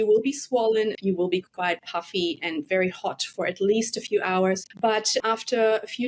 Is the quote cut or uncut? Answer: cut